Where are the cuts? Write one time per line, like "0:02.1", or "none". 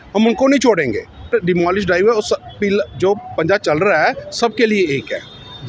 0:01.3